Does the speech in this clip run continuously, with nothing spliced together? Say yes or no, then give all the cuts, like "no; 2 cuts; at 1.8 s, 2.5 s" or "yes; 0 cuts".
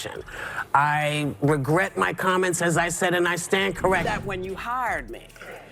no; 1 cut; at 4.1 s